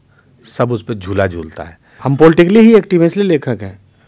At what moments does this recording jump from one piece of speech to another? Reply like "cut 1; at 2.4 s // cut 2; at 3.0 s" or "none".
cut 1; at 2.0 s

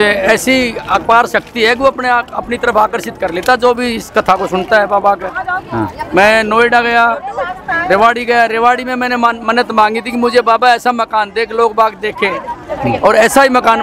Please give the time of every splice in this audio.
none

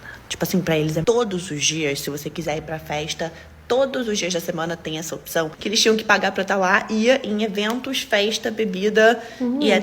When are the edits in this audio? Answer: cut 1; at 1.0 s // cut 2; at 5.6 s

